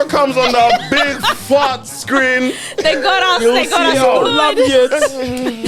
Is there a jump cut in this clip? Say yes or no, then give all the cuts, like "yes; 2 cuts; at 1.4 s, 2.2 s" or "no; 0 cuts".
no; 0 cuts